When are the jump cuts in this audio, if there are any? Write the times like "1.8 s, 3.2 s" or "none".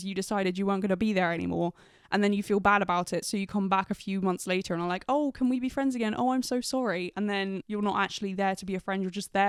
none